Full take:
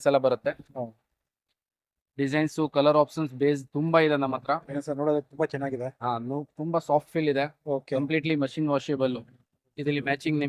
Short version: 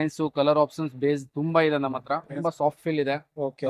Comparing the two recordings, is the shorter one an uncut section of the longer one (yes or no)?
no